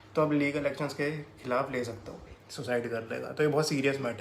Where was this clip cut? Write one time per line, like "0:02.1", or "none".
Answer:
0:02.2